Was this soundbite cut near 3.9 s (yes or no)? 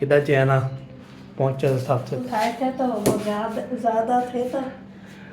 no